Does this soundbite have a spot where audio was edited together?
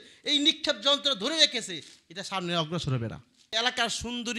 yes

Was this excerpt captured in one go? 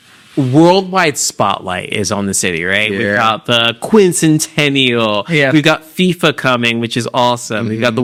yes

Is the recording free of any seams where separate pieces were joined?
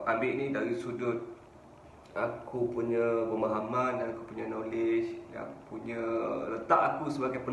yes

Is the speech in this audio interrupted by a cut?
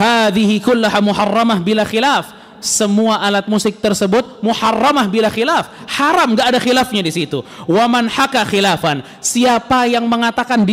no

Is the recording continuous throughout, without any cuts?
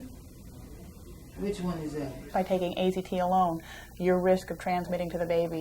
no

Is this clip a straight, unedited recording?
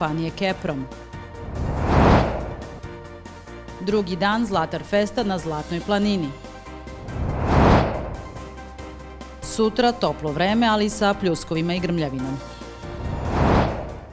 yes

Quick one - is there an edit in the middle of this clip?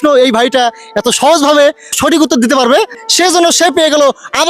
yes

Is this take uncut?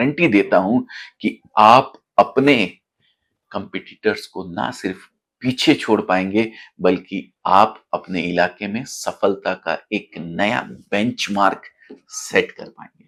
yes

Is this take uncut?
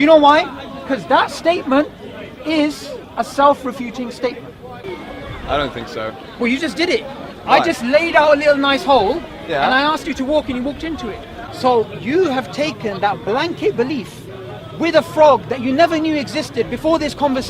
no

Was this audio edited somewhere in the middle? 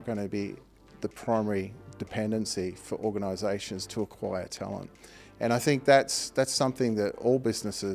no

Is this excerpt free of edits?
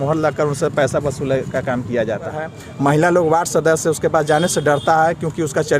no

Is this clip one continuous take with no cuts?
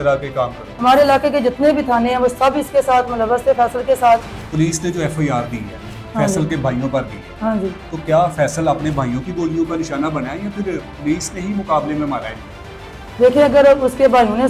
no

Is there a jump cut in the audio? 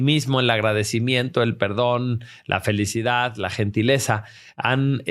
no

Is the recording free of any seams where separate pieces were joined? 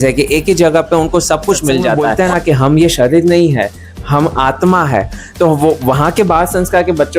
no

